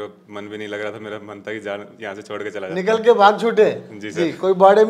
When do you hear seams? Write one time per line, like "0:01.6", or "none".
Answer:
none